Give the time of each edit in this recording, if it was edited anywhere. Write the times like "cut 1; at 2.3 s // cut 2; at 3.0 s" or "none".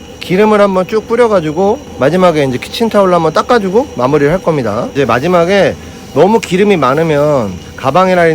cut 1; at 1.9 s // cut 2; at 4.9 s